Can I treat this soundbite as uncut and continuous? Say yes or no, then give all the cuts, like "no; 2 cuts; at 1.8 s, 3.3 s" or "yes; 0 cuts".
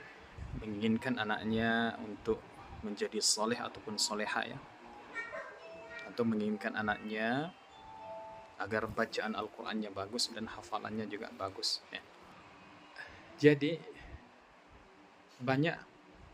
no; 1 cut; at 12.3 s